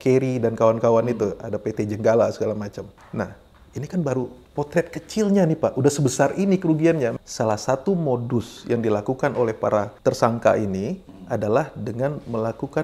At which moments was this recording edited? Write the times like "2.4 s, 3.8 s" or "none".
3.0 s, 4.4 s, 7.1 s, 9.9 s